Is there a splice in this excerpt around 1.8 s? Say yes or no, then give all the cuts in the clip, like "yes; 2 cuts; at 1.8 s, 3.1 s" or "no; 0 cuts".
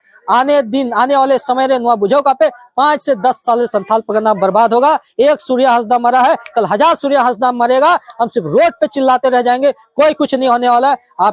no; 0 cuts